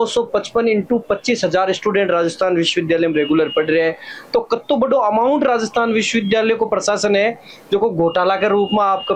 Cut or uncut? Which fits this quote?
uncut